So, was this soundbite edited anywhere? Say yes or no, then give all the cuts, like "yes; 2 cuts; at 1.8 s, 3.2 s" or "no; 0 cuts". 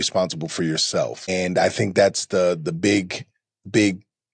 yes; 1 cut; at 1.3 s